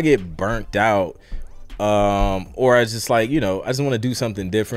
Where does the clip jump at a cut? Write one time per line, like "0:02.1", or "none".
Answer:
none